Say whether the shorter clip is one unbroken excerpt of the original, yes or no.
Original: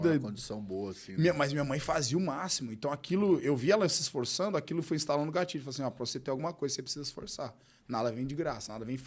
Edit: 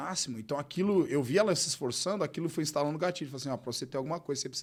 yes